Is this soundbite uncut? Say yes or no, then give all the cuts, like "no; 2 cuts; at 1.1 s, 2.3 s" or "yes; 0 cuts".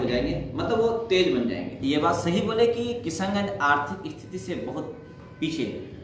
no; 1 cut; at 1.7 s